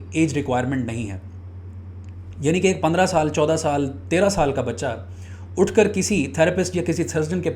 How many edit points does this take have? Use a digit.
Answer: 0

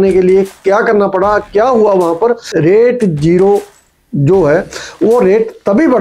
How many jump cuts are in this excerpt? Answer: 1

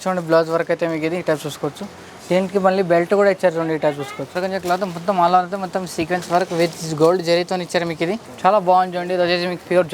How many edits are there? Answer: 2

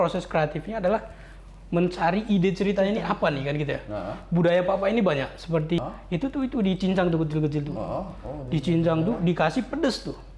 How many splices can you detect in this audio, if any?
1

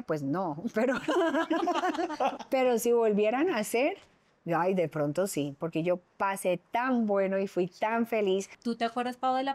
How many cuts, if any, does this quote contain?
2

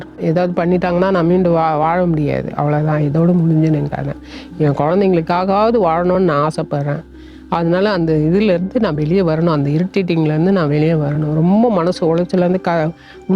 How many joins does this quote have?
0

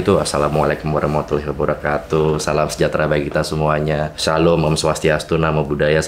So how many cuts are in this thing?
1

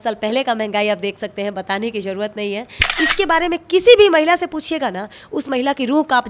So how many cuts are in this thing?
1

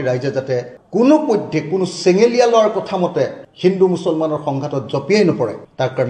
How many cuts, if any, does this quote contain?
0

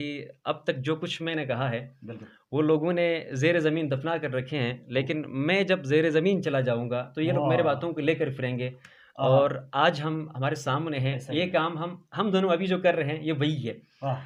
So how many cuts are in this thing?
0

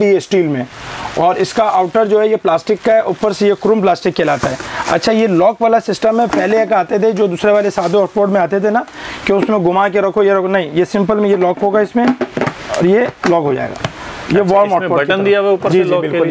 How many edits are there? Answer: 0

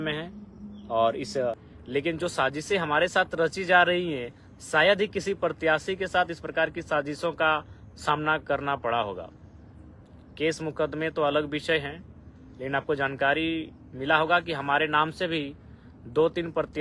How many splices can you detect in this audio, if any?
1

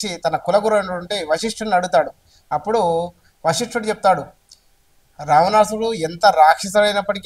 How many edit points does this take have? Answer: 0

